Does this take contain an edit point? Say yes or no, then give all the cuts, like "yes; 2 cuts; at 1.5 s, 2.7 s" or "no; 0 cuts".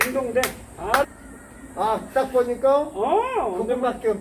yes; 1 cut; at 1.0 s